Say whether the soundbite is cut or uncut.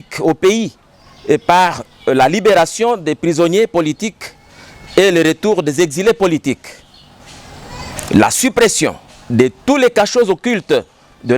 uncut